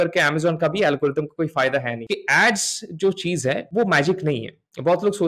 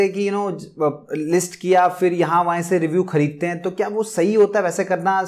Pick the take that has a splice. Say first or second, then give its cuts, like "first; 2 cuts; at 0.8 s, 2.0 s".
first; 2 cuts; at 2.0 s, 3.6 s